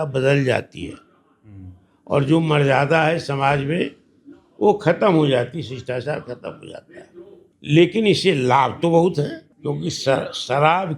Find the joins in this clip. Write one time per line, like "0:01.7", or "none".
0:07.4
0:09.5